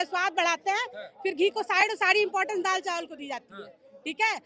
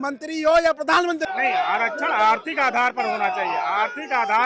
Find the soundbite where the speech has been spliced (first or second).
second